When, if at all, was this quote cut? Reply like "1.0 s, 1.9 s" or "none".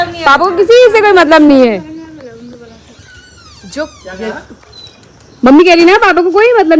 none